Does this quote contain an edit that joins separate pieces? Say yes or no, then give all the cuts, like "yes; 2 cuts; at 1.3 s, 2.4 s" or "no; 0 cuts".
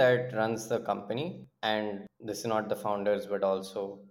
yes; 2 cuts; at 1.5 s, 2.1 s